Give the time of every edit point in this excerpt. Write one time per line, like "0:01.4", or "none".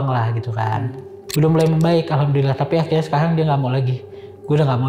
0:01.1